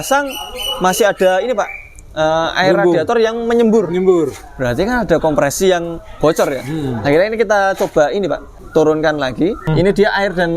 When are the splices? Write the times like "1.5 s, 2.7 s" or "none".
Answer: 8.6 s, 9.6 s